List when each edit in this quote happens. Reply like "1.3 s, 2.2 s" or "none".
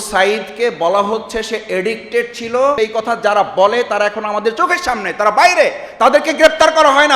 2.8 s